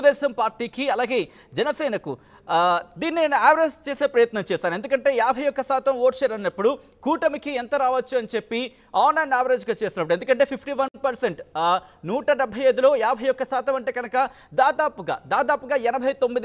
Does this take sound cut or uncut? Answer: uncut